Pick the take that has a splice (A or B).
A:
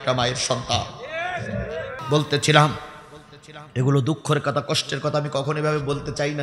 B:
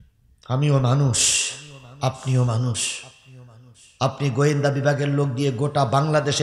A